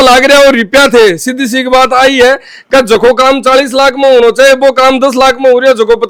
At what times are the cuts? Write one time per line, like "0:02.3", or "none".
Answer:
none